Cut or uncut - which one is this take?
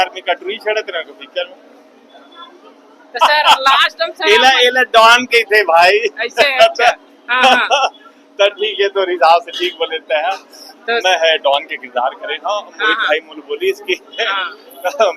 uncut